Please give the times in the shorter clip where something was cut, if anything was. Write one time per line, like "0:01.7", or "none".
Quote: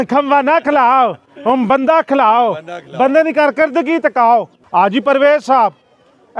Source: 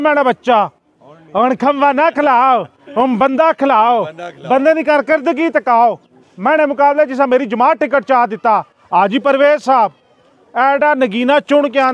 0:04.6

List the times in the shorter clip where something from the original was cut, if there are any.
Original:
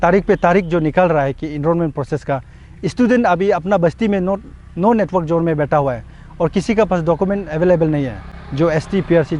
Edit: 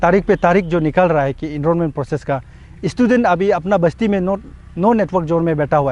none

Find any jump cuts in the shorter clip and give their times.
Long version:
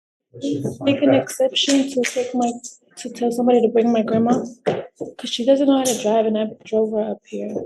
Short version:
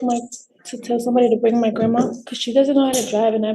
0:02.2

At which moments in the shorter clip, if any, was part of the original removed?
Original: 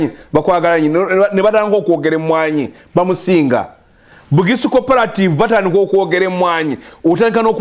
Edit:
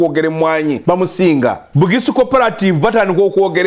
0:00.8
0:01.6

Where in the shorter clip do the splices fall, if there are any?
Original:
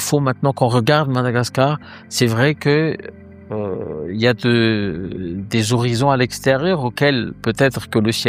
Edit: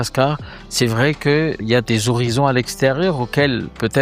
0:01.7

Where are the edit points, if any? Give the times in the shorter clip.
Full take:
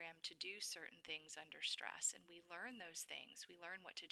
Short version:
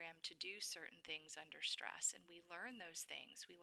none

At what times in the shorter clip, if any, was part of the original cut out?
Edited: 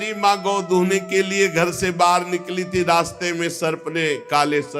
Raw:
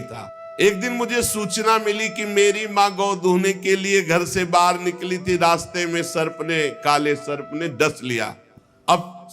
none

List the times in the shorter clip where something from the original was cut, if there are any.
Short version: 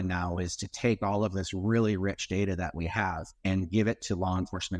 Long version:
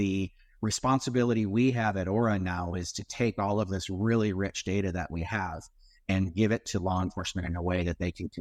0:03.3

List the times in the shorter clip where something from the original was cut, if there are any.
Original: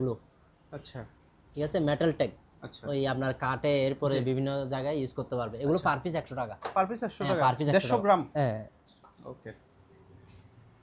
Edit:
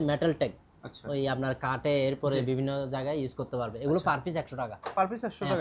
none

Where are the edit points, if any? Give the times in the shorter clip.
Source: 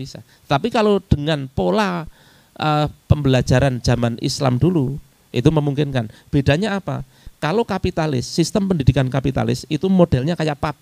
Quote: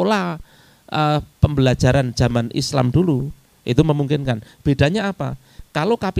none

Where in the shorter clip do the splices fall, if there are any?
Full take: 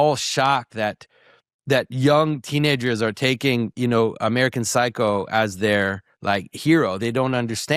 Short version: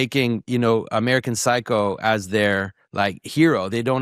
none

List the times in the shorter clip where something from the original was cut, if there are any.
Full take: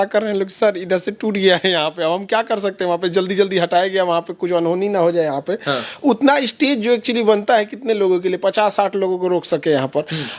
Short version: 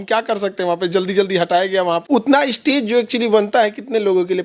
0:02.0

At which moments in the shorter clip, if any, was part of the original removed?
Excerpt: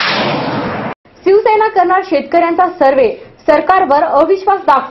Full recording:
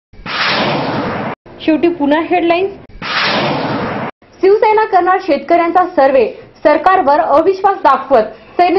0:01.0

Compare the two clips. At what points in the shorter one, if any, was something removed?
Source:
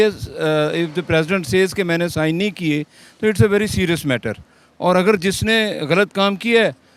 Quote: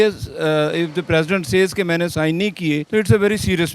0:02.9

